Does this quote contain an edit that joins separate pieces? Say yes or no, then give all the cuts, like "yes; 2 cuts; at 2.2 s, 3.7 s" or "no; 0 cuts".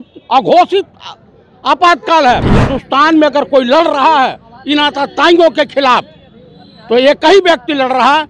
yes; 1 cut; at 2.5 s